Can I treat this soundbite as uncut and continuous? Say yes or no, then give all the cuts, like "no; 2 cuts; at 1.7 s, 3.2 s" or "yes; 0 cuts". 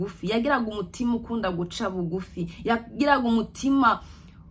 yes; 0 cuts